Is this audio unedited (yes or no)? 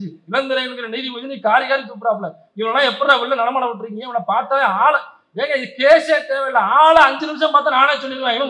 yes